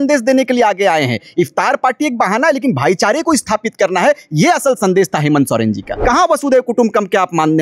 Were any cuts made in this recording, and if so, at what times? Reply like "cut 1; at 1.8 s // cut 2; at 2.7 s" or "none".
cut 1; at 5.9 s